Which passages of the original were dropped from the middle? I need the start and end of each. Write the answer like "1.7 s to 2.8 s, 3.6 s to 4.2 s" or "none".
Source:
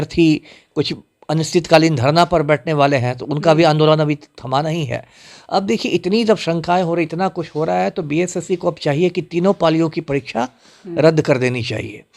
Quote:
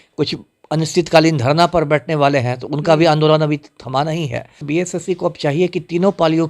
5.2 s to 8.0 s